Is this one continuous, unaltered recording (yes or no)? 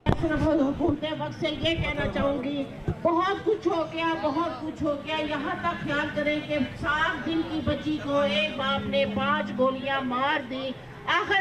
yes